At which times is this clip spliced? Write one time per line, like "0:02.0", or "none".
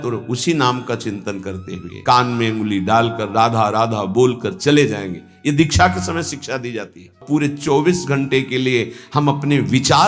0:01.9
0:07.2